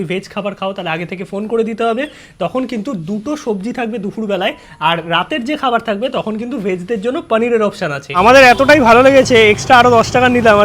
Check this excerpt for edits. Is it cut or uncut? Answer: cut